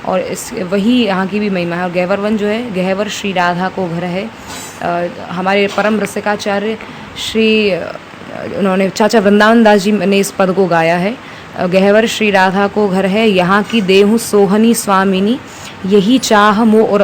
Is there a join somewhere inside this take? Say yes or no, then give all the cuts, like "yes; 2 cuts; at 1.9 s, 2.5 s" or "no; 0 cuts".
no; 0 cuts